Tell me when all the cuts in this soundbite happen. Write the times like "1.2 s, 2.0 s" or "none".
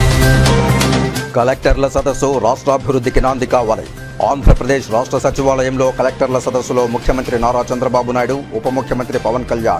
1.0 s